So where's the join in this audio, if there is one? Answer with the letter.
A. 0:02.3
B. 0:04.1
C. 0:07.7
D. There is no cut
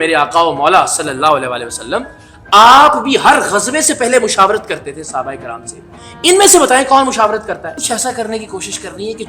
C